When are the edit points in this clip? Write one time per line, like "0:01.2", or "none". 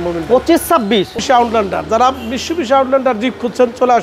0:01.2